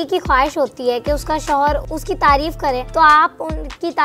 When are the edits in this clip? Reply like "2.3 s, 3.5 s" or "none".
1.8 s, 2.9 s